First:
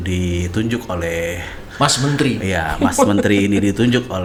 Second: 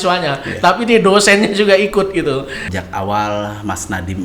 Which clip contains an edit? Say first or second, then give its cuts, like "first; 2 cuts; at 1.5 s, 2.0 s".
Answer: second; 1 cut; at 2.6 s